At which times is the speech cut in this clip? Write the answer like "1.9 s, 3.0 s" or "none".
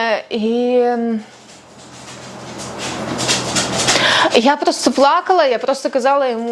none